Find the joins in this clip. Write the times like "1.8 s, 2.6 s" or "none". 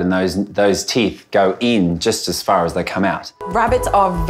3.3 s

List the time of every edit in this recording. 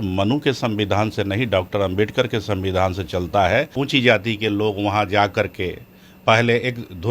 3.7 s

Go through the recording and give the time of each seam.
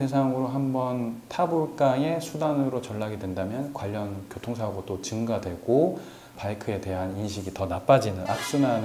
none

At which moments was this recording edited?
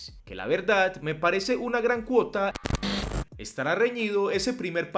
3.0 s

